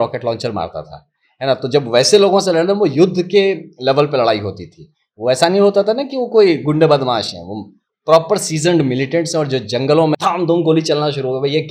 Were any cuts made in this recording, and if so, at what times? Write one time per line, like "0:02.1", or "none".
0:10.2